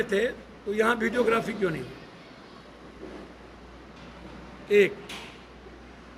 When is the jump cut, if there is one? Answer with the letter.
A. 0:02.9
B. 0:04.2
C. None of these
C